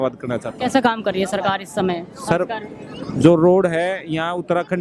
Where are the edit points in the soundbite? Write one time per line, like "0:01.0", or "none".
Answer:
none